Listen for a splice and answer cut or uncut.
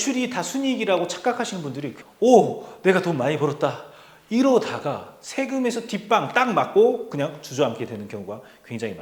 cut